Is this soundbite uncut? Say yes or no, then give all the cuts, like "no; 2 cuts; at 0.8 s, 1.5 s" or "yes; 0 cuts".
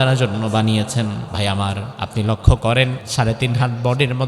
no; 3 cuts; at 1.3 s, 1.9 s, 3.0 s